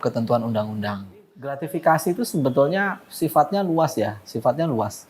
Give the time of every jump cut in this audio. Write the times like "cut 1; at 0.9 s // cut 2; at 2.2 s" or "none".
cut 1; at 1.6 s